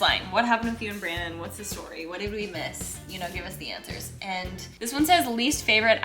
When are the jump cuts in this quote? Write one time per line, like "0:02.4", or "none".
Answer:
0:04.7